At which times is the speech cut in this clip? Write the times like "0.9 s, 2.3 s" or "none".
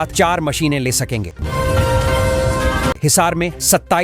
1.3 s, 3.0 s